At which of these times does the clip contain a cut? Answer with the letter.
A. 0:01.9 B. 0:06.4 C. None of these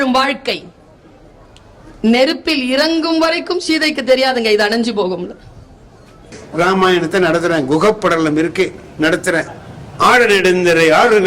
B